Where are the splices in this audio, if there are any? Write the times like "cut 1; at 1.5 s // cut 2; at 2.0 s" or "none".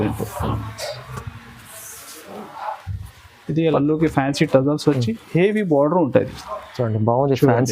cut 1; at 3.7 s